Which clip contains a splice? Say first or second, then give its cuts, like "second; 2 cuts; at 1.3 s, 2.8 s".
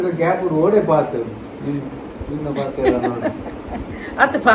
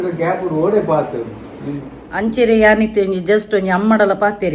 second; 1 cut; at 2.1 s